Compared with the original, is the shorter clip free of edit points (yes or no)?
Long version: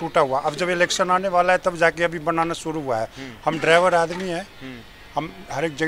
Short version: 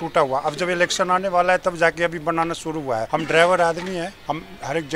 no